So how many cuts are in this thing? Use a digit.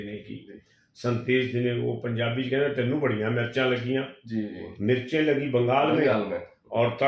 0